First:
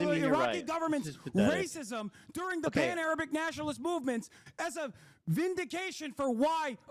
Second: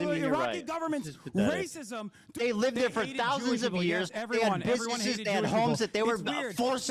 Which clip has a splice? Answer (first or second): second